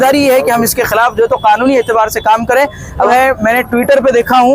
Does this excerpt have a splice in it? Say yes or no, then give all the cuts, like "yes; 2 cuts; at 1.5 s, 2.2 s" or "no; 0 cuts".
yes; 1 cut; at 3.1 s